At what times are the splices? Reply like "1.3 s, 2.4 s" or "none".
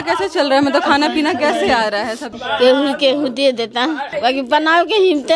2.3 s, 4.1 s